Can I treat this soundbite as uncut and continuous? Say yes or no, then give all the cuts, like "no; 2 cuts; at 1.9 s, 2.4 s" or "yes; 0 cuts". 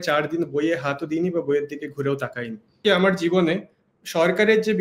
no; 1 cut; at 2.8 s